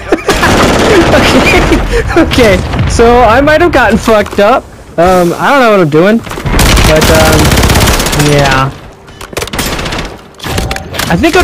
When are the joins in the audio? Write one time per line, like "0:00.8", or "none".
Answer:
none